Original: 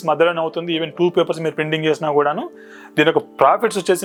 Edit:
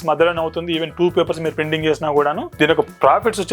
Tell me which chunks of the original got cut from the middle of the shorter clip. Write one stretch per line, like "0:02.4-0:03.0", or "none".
0:02.4-0:02.8